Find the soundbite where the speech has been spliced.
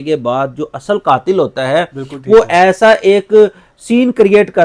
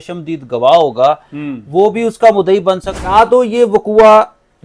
second; 1 cut; at 3.0 s

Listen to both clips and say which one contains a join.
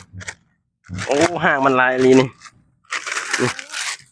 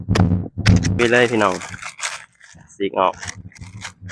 second; 1 cut; at 0.9 s

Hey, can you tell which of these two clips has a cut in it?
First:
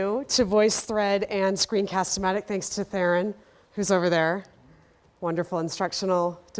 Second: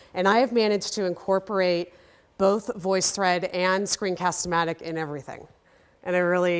first; 1 cut; at 1.6 s

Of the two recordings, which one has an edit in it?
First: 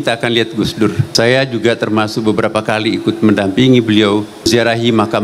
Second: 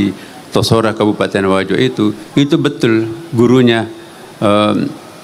first; 2 cuts; at 1.0 s, 4.5 s

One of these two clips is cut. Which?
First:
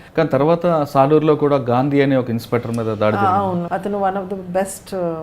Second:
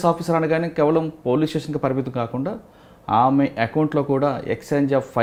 first; 1 cut; at 3.7 s

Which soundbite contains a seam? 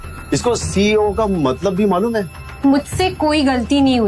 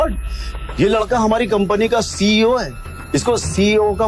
first; 1 cut; at 2.4 s

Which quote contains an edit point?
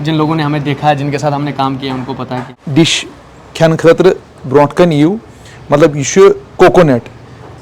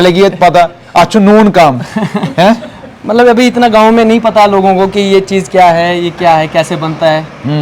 first; 1 cut; at 2.6 s

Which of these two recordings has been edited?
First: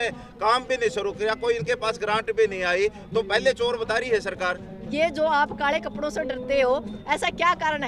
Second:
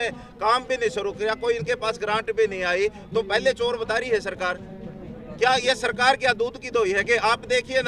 first; 1 cut; at 4.8 s

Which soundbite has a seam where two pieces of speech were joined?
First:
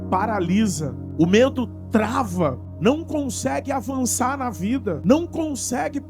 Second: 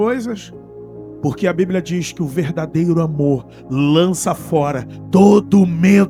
first; 3 cuts; at 0.9 s, 2.7 s, 5.0 s

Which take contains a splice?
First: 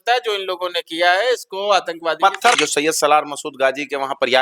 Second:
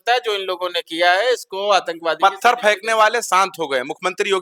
first; 1 cut; at 2.6 s

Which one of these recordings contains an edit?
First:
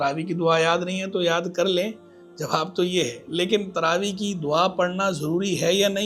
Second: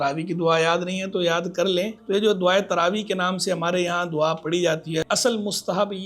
second; 2 cuts; at 2.0 s, 5.1 s

